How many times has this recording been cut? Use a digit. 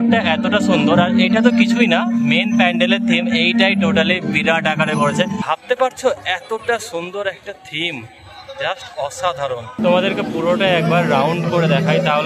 2